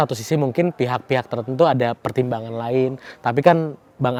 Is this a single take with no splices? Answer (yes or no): yes